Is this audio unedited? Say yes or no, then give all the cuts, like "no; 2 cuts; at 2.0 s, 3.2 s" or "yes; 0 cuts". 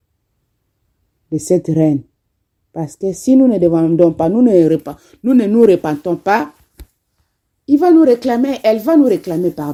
yes; 0 cuts